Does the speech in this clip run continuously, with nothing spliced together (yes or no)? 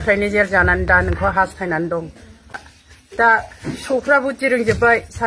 no